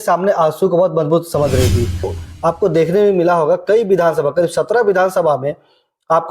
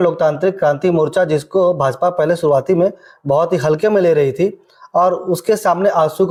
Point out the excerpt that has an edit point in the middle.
first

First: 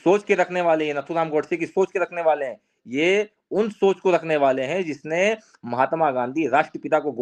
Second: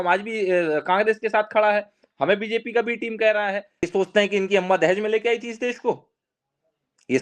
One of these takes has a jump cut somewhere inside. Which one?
second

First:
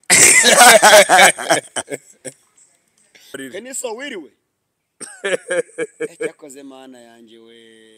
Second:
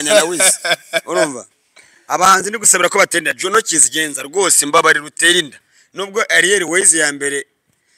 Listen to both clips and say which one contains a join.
first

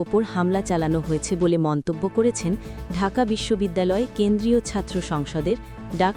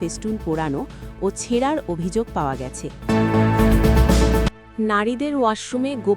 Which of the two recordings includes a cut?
second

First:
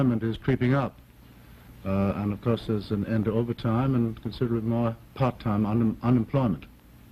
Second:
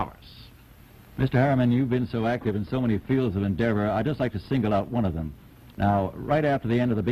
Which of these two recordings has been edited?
second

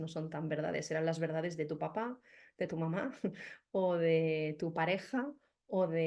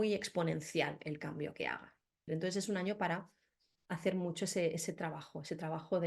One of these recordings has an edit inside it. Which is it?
second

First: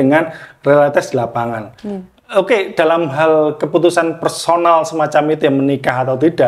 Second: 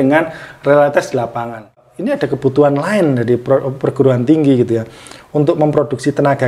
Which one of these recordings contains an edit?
second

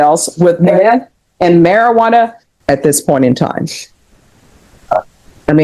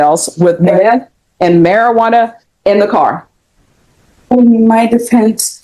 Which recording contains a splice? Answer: first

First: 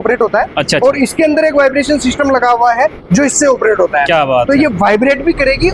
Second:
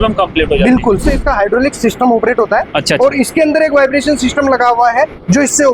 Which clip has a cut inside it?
second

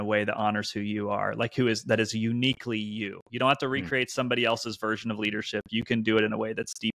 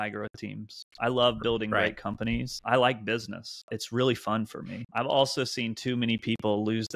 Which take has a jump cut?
second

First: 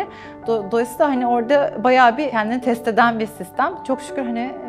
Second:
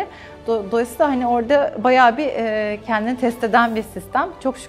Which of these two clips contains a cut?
first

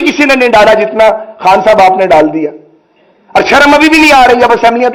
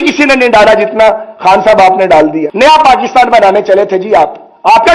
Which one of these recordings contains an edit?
second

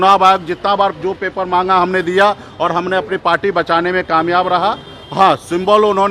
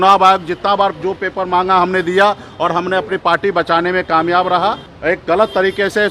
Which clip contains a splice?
second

